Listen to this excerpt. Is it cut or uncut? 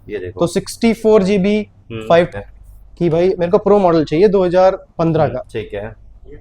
cut